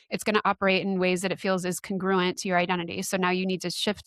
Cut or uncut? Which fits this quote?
uncut